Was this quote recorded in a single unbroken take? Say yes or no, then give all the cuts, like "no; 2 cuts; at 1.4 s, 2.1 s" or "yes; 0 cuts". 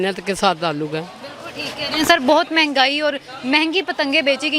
yes; 0 cuts